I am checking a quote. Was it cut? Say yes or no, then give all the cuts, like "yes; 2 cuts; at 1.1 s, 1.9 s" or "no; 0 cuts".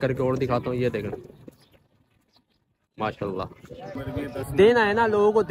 yes; 1 cut; at 4.0 s